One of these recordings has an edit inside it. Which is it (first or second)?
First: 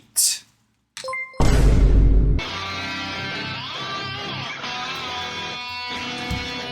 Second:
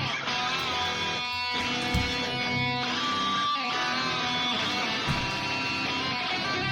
first